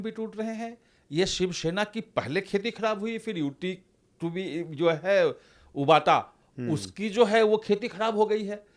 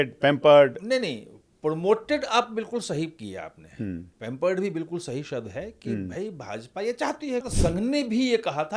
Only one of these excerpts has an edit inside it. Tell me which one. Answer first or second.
second